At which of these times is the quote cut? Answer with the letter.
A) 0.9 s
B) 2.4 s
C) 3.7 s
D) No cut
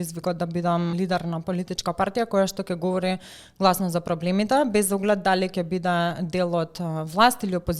A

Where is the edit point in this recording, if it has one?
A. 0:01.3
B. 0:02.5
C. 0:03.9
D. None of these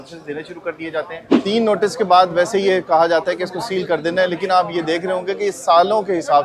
A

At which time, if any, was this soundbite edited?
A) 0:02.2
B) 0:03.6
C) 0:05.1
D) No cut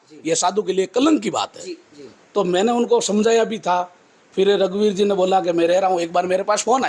D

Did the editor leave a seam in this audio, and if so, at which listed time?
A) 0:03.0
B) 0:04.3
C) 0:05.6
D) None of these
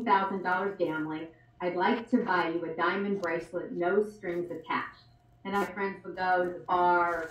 C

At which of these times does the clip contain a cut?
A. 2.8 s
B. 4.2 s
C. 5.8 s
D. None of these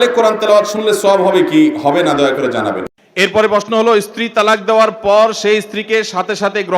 A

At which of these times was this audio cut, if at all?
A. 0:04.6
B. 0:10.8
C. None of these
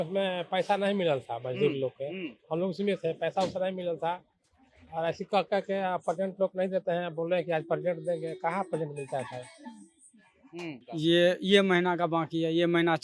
B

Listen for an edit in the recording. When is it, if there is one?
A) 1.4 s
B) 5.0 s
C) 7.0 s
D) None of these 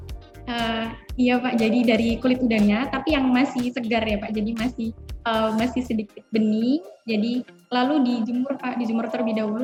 D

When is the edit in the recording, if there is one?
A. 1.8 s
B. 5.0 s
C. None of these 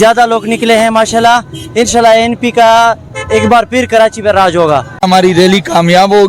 B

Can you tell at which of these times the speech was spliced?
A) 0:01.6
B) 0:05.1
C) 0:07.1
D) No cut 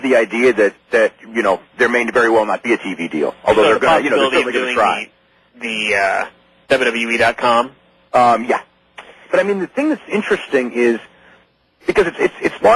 D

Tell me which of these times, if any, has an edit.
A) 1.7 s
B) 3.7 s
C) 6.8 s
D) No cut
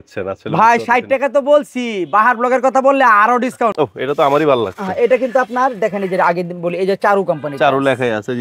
B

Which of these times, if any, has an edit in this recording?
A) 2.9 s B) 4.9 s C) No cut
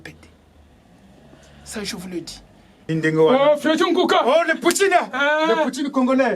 A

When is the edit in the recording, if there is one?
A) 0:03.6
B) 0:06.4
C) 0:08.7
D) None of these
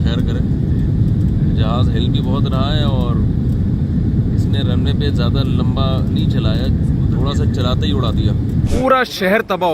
C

